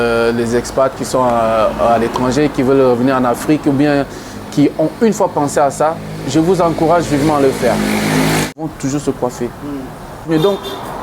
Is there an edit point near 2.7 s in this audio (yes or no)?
no